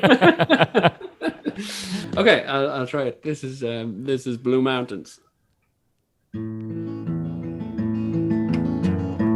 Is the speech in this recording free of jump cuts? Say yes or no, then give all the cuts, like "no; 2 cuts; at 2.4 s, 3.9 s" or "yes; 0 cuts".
no; 1 cut; at 2.1 s